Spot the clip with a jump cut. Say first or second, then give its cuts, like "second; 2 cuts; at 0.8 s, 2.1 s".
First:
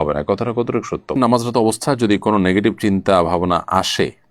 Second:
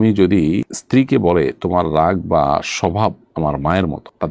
first; 1 cut; at 1.2 s